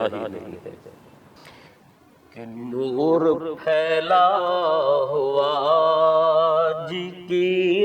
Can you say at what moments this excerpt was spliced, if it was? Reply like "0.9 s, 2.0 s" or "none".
1.4 s